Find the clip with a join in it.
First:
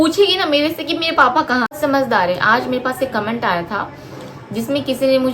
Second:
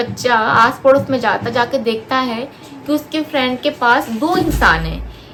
first; 1 cut; at 1.7 s

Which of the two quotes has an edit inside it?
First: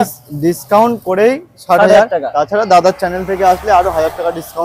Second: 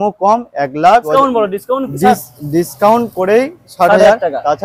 second; 1 cut; at 1.1 s

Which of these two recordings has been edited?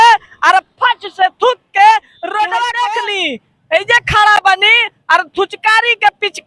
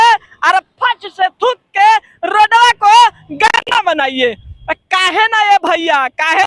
first; 1 cut; at 2.9 s

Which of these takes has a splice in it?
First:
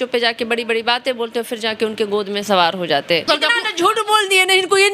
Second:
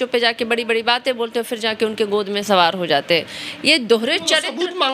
first; 1 cut; at 3.2 s

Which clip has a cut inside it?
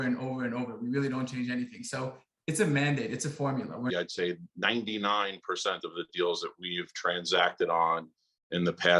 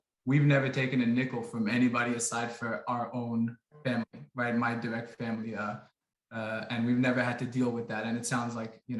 first; 1 cut; at 3.9 s

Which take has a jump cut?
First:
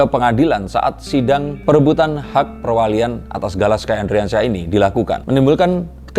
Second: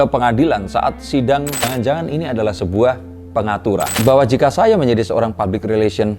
second; 2 cuts; at 1.6 s, 3.9 s

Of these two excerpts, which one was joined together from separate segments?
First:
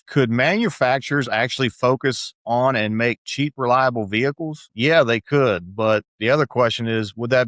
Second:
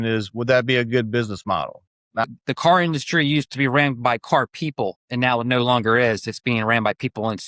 second; 1 cut; at 2.2 s

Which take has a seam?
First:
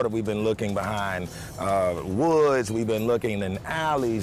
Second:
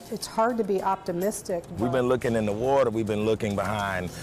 second; 1 cut; at 1.7 s

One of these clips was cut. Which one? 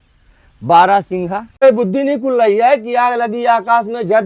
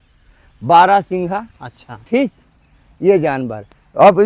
first; 1 cut; at 1.6 s

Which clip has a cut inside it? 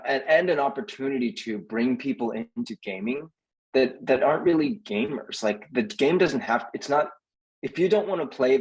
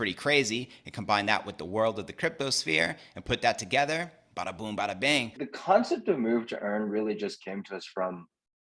second; 1 cut; at 5.4 s

